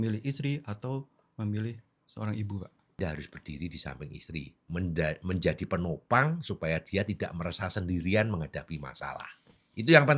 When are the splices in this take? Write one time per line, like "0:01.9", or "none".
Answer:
0:03.0